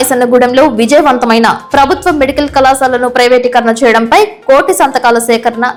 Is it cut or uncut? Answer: uncut